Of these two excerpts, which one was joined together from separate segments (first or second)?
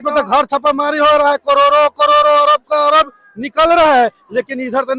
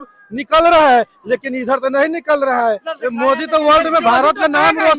second